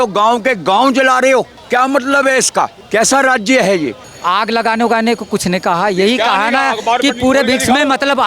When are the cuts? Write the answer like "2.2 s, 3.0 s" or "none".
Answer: 1.6 s, 2.8 s, 4.1 s